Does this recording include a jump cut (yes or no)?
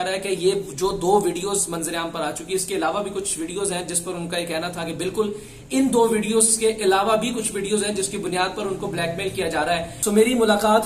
yes